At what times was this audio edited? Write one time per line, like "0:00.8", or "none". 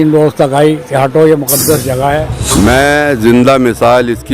0:02.3